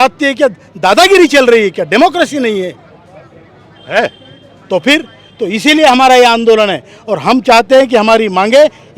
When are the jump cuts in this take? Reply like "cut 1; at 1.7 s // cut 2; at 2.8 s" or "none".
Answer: none